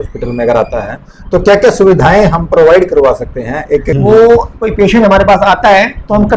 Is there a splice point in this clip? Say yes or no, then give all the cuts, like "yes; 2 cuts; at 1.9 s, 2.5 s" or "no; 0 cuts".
yes; 1 cut; at 3.9 s